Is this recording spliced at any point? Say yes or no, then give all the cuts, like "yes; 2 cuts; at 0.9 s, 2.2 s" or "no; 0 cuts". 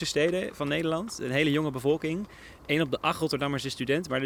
no; 0 cuts